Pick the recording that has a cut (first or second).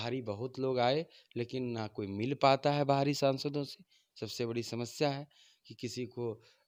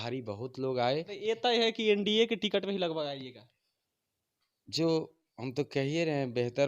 second